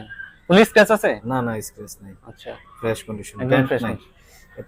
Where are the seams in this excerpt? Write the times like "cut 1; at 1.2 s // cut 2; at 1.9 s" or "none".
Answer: none